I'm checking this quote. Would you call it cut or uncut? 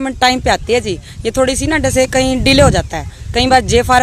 uncut